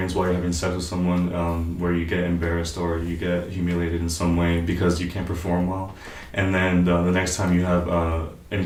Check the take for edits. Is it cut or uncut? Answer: uncut